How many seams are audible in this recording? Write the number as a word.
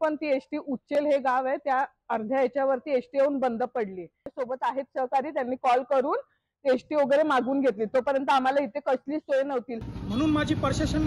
two